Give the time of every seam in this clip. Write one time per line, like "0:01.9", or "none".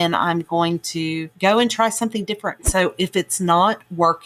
0:01.3
0:02.6